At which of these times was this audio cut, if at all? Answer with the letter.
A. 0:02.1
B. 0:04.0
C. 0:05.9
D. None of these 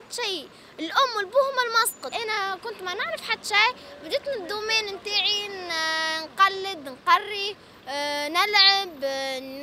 A